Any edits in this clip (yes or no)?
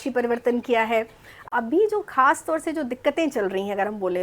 yes